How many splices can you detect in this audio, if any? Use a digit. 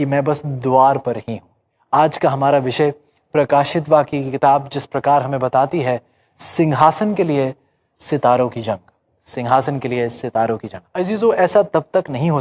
2